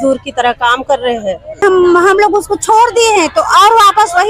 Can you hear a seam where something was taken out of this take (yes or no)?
yes